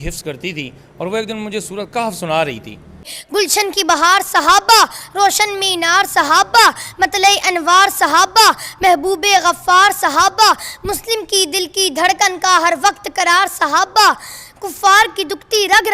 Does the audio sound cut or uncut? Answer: cut